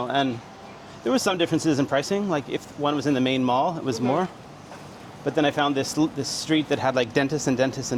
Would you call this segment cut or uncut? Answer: uncut